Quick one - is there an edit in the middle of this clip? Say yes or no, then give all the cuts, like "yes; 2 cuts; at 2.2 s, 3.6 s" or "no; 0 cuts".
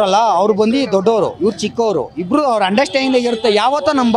no; 0 cuts